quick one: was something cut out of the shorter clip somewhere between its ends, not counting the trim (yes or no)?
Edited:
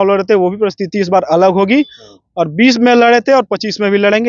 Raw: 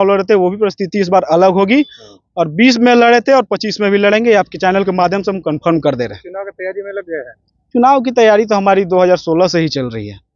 no